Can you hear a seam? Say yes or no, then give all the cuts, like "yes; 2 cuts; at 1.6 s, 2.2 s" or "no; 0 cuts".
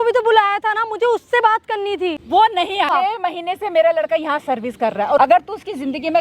yes; 3 cuts; at 2.2 s, 2.9 s, 5.2 s